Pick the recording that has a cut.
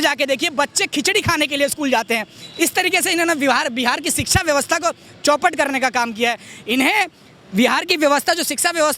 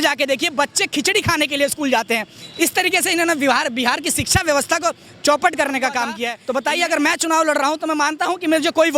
second; 1 cut; at 6.3 s

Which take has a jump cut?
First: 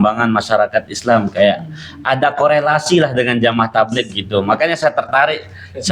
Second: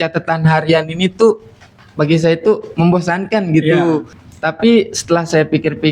second; 1 cut; at 4.1 s

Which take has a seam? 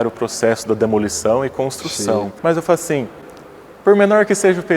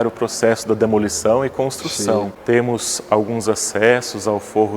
second; 1 cut; at 2.3 s

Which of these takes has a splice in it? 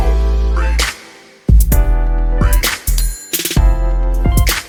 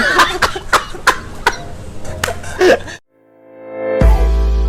second; 1 cut; at 2.9 s

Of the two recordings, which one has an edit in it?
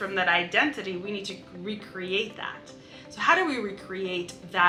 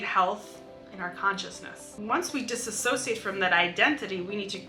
second; 1 cut; at 2.0 s

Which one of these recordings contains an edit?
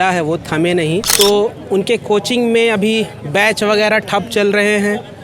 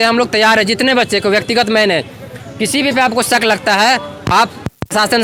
first; 1 cut; at 1.1 s

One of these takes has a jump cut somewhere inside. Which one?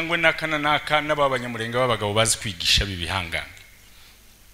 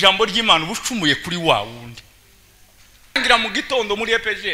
second; 1 cut; at 3.2 s

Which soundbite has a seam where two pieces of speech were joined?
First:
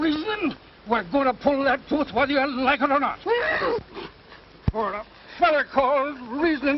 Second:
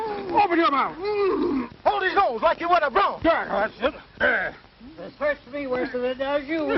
second; 1 cut; at 3.6 s

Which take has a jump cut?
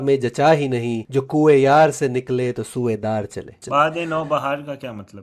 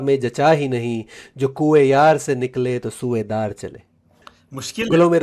first; 2 cuts; at 1.0 s, 3.6 s

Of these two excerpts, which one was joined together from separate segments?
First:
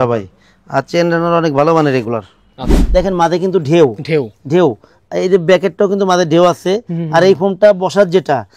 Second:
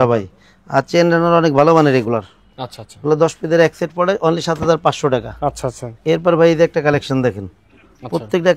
first; 1 cut; at 2.7 s

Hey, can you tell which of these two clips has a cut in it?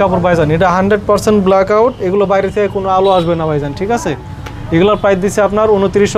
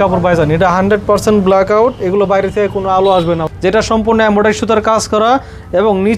second; 1 cut; at 3.4 s

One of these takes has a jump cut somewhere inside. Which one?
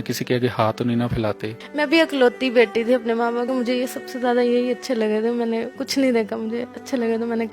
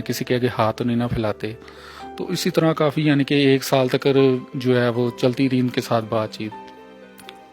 first; 3 cuts; at 1.6 s, 3.5 s, 5.8 s

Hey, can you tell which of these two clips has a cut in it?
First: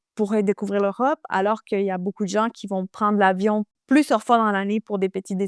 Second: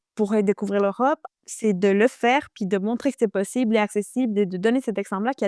second; 1 cut; at 1.2 s

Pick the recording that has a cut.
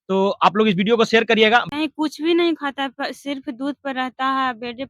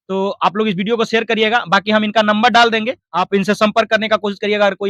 first; 1 cut; at 1.7 s

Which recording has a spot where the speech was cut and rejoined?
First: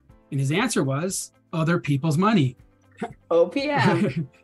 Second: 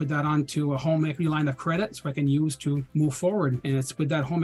second; 2 cuts; at 2.9 s, 3.6 s

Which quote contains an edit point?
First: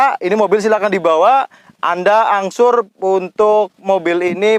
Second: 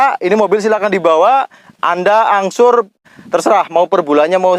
second; 1 cut; at 3.0 s

